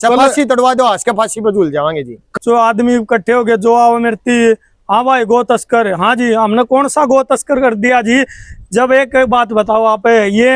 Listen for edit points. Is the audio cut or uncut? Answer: cut